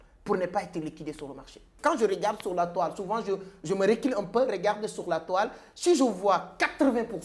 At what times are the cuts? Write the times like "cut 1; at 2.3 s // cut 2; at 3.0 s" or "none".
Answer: cut 1; at 1.7 s